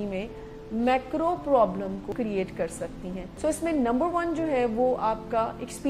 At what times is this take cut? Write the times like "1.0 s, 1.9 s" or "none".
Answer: 2.1 s